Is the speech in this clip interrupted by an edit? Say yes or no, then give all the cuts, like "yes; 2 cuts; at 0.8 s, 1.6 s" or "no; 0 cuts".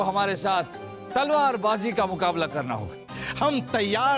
yes; 1 cut; at 3.0 s